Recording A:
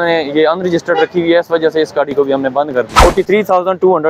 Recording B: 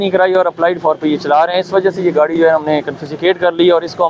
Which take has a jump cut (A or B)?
A